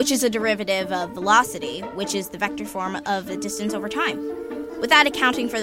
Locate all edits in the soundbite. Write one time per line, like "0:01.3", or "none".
0:01.5